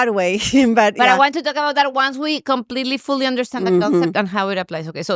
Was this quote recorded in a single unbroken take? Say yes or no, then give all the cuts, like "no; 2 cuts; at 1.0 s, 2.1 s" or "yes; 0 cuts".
yes; 0 cuts